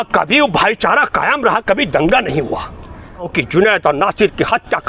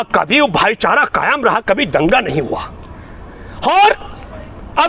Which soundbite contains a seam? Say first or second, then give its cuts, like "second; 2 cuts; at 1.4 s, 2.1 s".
first; 1 cut; at 3.4 s